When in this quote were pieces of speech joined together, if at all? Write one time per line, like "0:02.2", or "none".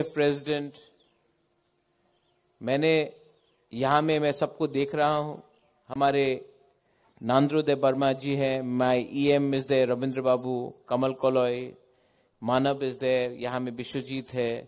0:07.5

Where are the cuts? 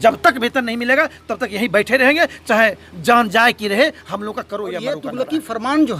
0:05.1

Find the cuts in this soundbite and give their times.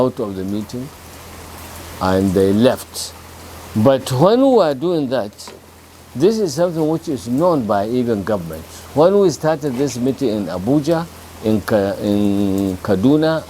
none

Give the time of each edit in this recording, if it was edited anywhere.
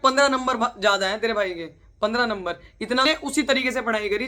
0:03.0

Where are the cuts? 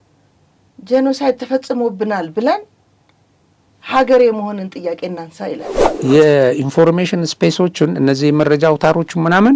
0:05.9

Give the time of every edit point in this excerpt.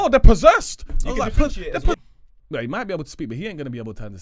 0:02.0

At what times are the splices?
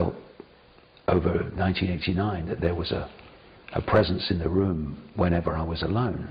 none

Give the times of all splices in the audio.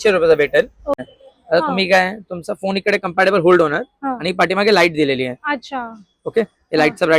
0:01.0

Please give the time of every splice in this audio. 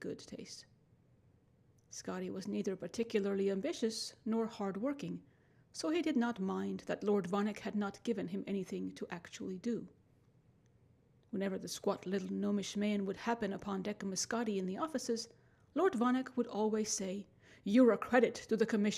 0:07.4

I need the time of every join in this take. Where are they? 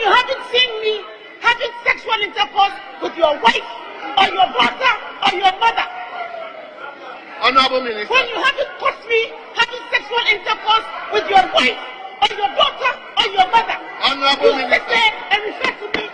none

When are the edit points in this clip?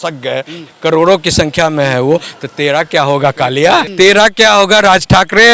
0:03.9

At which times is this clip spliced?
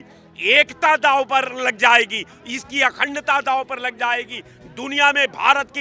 none

